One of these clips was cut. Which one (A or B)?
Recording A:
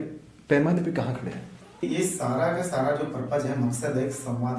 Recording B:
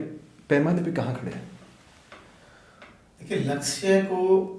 A